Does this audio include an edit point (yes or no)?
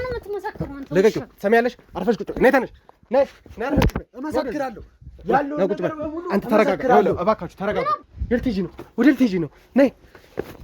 yes